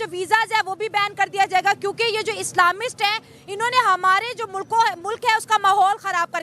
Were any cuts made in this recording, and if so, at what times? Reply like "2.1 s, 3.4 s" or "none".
none